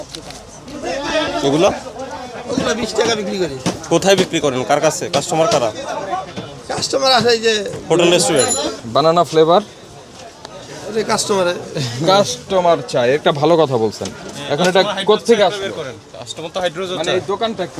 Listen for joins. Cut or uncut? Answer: cut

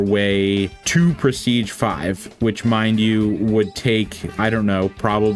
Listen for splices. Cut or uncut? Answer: uncut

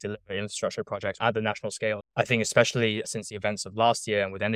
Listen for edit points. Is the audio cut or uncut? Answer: cut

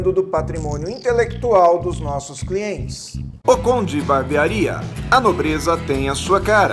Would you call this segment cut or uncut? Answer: uncut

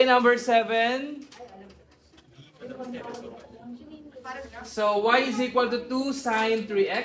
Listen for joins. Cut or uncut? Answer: uncut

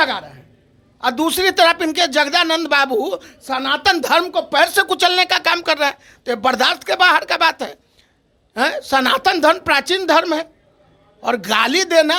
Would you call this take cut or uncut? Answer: uncut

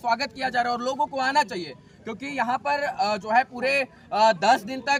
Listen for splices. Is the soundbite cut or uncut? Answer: uncut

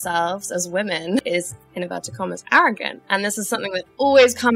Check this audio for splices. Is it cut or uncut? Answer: cut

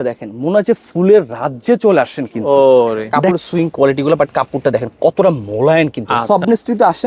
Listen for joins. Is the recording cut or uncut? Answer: cut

